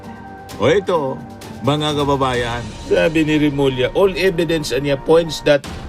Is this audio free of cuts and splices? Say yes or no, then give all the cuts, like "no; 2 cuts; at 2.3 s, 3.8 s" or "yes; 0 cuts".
no; 1 cut; at 2.7 s